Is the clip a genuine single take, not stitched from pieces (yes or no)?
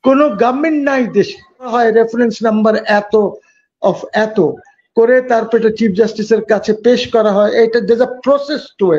no